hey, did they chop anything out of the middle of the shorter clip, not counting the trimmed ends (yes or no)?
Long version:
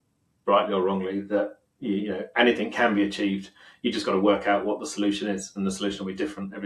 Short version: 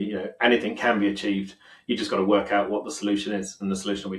no